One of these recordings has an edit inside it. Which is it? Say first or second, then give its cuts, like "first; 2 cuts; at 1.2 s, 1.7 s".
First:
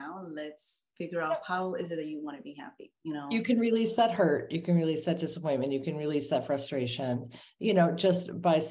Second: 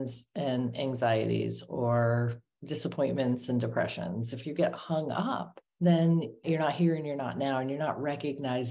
second; 3 cuts; at 2.5 s, 5.6 s, 6.4 s